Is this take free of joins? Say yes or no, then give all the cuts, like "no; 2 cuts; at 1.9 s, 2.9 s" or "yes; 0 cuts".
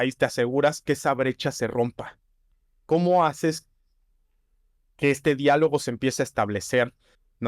yes; 0 cuts